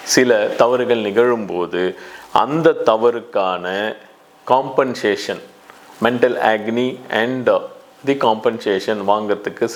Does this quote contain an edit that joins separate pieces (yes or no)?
no